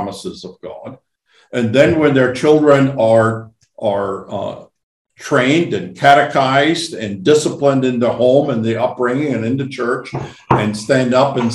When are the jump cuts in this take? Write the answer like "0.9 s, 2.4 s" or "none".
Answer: none